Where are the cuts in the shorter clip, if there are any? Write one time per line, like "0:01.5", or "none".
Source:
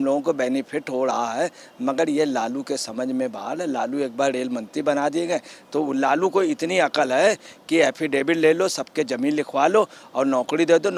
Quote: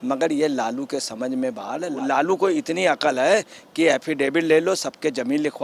0:02.0